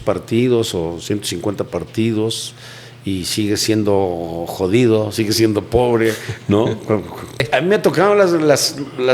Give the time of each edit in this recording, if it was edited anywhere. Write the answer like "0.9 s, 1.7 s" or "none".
7.5 s